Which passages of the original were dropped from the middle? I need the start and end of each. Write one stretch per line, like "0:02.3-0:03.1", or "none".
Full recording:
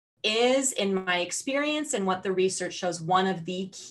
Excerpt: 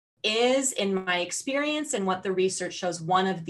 none